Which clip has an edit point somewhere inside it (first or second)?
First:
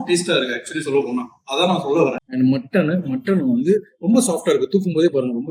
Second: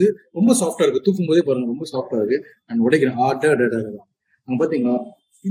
first